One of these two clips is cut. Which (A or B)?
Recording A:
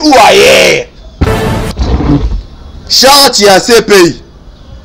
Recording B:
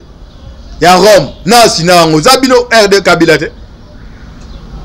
A